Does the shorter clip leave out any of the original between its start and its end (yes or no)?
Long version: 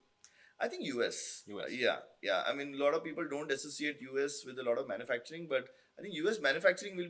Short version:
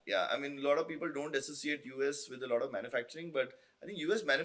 no